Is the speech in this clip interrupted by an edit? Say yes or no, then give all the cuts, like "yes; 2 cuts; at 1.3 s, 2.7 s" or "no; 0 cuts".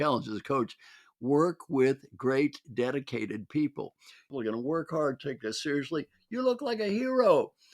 yes; 1 cut; at 4.3 s